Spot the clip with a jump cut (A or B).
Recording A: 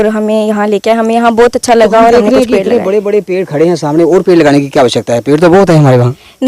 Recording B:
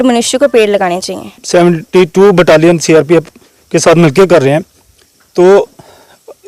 B